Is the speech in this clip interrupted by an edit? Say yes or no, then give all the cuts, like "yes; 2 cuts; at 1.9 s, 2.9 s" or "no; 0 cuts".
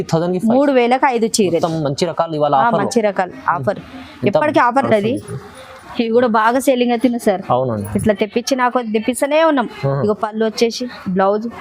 yes; 1 cut; at 4.8 s